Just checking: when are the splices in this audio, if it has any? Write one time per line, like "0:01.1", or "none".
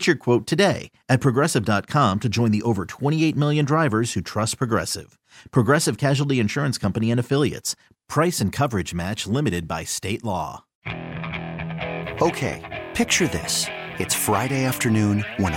0:10.7

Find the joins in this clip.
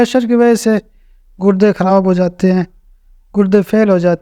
none

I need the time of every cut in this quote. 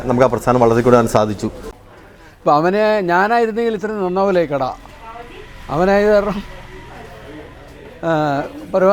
0:01.7

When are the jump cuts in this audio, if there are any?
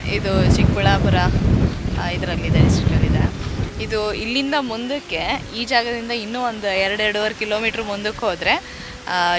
none

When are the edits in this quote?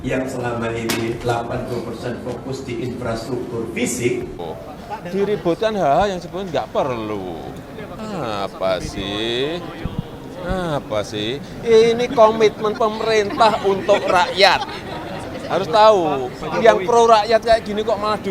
0:04.5

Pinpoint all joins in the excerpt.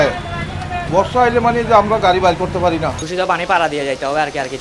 0:03.0

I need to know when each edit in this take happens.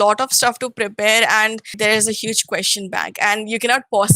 0:01.7

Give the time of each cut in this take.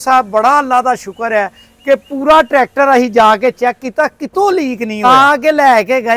0:05.0

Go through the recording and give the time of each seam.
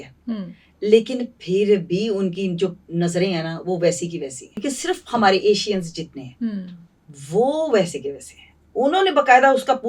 0:04.6

